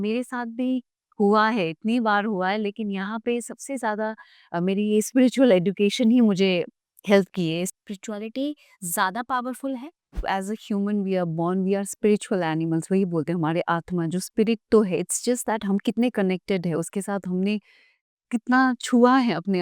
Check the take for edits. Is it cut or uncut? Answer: cut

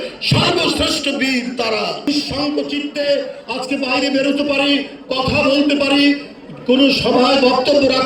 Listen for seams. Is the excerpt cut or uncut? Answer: cut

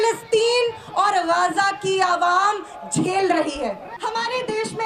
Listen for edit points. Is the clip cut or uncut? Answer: cut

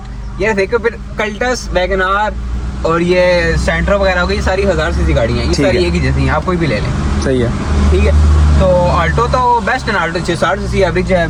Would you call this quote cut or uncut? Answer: uncut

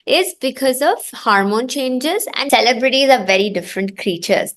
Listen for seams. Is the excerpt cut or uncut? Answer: cut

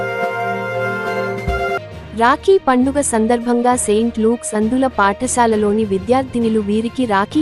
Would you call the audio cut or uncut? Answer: uncut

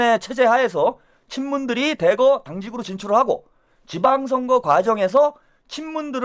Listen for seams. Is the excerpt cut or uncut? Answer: uncut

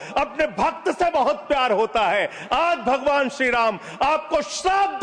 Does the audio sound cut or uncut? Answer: uncut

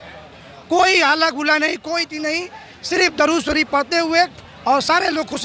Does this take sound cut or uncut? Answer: uncut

